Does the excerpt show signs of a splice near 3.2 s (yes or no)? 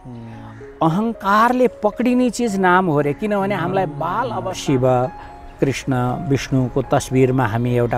no